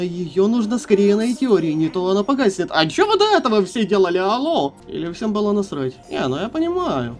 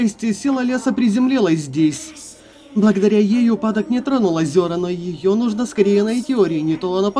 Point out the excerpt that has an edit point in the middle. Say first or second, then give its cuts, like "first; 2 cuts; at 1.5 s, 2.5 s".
first; 2 cuts; at 4.8 s, 6.0 s